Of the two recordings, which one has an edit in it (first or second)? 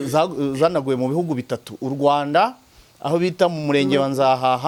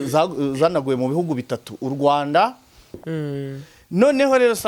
second